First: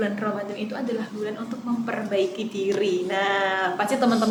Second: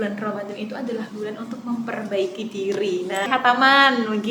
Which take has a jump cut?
second; 1 cut; at 3.3 s

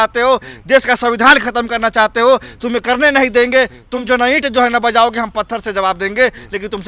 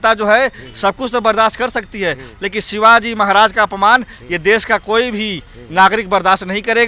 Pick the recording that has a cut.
first; 1 cut; at 3.8 s

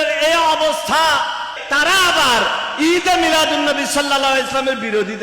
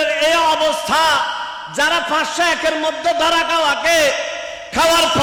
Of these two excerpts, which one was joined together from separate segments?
first; 1 cut; at 1.6 s

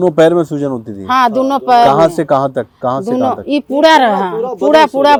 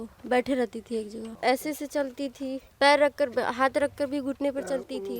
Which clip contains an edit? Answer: second; 2 cuts; at 1.3 s, 2.6 s

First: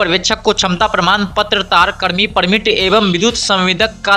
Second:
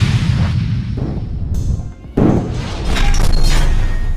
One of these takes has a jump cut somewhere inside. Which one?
second; 1 cut; at 2.7 s

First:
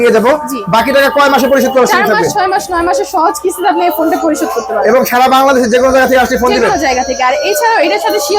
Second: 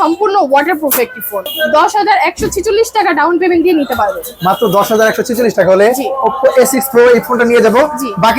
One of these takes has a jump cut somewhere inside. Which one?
second; 1 cut; at 1.5 s

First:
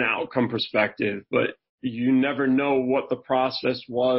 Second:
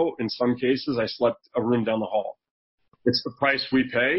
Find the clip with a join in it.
second; 2 cuts; at 1.5 s, 2.9 s

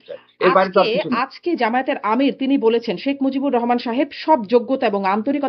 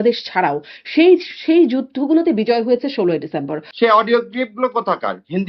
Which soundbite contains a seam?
second; 1 cut; at 3.6 s

